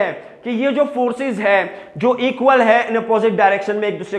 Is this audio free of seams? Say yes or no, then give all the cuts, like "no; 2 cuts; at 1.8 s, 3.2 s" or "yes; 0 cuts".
yes; 0 cuts